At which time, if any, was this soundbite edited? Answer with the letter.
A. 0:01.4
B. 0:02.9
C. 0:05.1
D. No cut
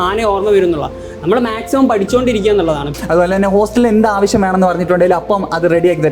B